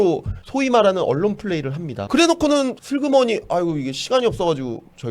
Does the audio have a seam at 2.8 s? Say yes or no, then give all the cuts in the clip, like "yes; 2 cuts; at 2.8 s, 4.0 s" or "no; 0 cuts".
yes; 1 cut; at 2.8 s